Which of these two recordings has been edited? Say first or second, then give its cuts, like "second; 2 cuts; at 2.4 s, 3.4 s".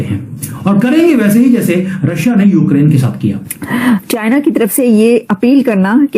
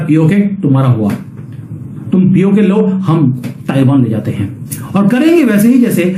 first; 1 cut; at 4.0 s